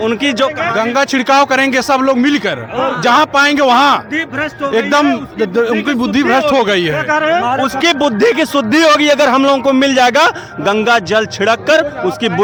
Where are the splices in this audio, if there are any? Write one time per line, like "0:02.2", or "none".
none

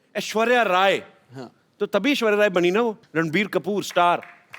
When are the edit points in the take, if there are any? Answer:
0:03.0

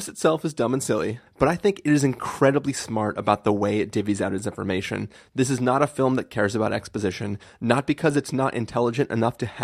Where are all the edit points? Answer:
0:01.2

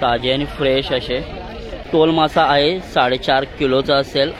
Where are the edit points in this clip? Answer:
0:01.9

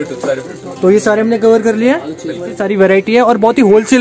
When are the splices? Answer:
0:02.5

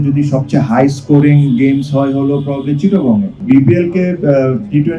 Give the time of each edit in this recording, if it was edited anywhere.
0:03.4

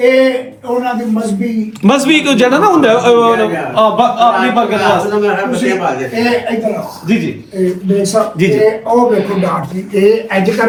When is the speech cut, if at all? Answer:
none

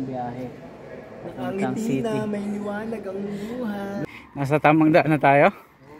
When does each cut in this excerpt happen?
0:04.0

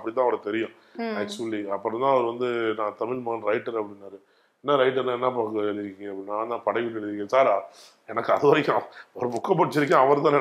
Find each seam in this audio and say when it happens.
none

